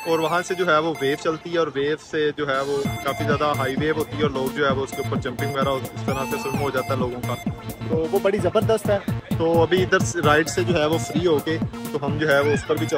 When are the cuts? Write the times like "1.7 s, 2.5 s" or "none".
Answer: none